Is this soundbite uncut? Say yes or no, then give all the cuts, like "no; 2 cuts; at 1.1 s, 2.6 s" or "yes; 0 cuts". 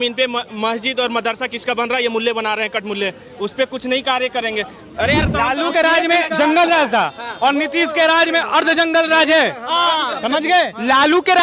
no; 1 cut; at 5.3 s